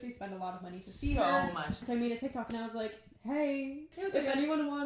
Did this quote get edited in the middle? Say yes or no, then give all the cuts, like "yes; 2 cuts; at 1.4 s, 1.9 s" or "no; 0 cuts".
yes; 2 cuts; at 1.9 s, 3.9 s